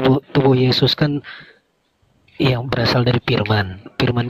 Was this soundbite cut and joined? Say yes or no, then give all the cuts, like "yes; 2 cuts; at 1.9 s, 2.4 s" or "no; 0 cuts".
no; 0 cuts